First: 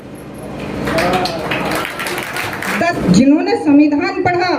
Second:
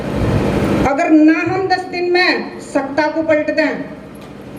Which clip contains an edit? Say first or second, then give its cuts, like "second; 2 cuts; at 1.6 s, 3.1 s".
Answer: first; 1 cut; at 2.9 s